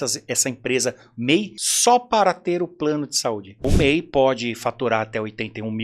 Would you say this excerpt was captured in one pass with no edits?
no; 2 cuts; at 1.6 s, 3.6 s

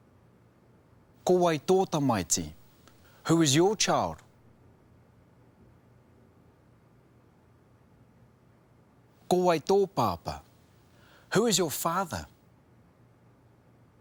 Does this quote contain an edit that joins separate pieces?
no; 0 cuts

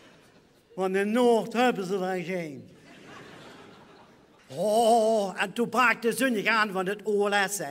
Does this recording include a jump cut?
yes; 1 cut; at 2.4 s

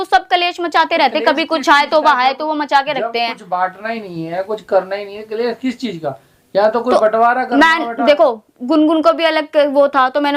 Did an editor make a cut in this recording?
no; 0 cuts

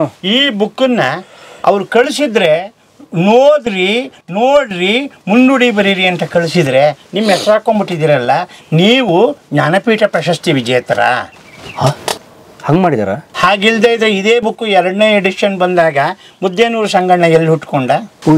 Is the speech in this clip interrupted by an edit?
no; 0 cuts

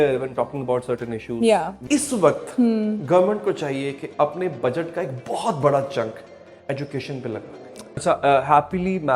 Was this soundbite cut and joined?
yes; 2 cuts; at 1.8 s, 8.0 s

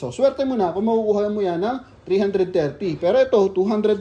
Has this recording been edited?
no; 0 cuts

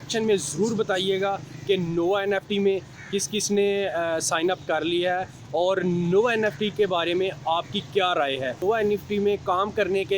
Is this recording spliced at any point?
yes; 1 cut; at 8.6 s

